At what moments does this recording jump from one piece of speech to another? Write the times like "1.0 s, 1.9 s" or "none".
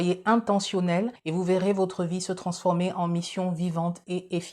1.2 s

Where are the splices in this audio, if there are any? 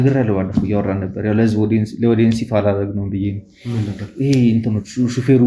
none

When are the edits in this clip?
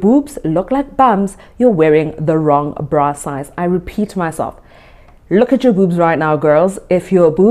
none

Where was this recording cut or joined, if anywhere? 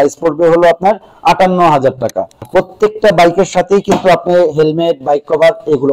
2.4 s

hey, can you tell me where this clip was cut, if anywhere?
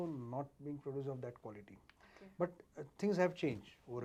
none

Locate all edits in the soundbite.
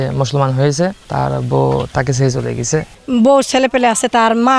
1.0 s, 2.9 s

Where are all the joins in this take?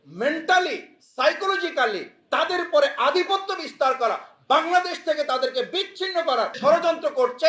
6.6 s

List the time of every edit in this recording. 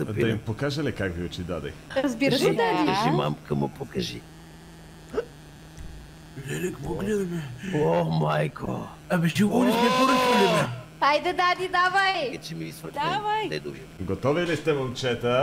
1.8 s, 13.9 s

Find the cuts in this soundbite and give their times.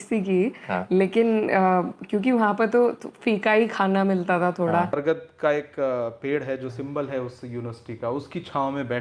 5.0 s

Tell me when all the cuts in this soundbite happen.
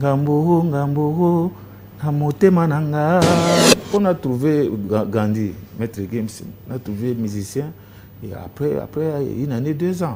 3.7 s

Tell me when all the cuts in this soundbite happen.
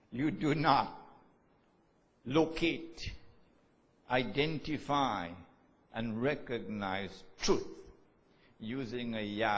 6.3 s

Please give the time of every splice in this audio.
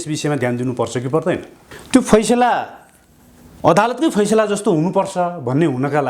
1.7 s

